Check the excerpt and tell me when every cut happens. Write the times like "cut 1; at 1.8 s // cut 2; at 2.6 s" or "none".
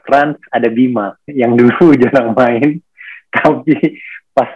none